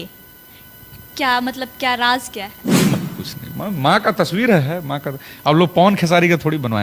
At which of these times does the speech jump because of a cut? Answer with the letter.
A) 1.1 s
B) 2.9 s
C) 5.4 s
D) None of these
B